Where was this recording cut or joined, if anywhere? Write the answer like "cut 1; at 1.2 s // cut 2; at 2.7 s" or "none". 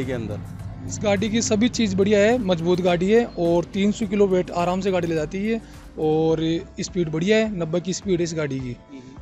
none